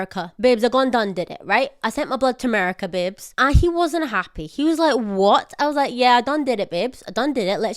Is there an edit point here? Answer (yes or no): no